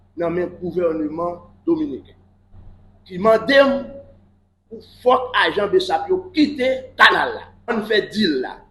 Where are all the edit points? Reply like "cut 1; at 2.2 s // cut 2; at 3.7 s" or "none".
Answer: cut 1; at 7.7 s